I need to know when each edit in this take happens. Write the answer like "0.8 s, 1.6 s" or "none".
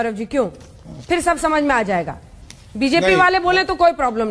none

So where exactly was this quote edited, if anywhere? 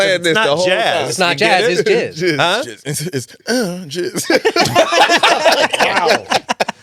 none

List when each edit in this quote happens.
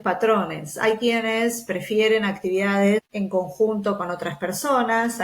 3.1 s

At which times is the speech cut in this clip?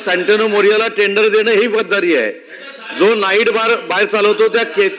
none

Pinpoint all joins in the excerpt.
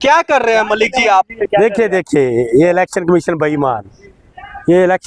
none

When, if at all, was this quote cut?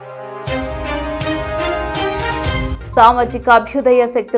0.9 s, 2.7 s

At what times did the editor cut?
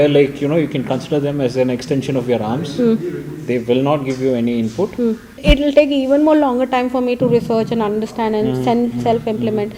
5.4 s

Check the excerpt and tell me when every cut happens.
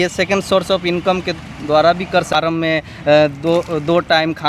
2.3 s

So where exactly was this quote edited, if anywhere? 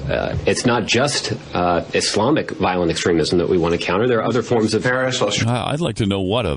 none

